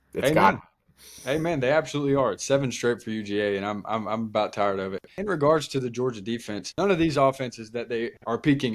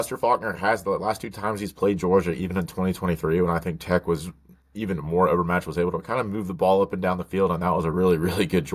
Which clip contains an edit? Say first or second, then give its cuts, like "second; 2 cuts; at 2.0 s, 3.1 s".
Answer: first; 2 cuts; at 5.1 s, 6.6 s